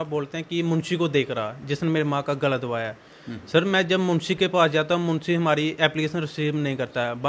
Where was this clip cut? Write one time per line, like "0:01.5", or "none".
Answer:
none